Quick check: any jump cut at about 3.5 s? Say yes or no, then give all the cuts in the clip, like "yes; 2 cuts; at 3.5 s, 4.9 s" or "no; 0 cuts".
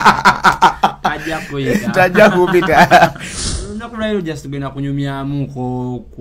yes; 1 cut; at 3.5 s